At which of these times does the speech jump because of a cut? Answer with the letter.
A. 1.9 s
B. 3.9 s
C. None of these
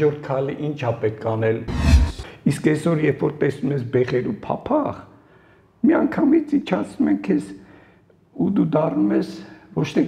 A